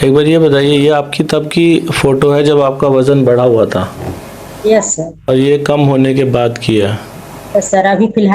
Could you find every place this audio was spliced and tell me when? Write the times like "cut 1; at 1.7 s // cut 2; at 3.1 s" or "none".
cut 1; at 5.3 s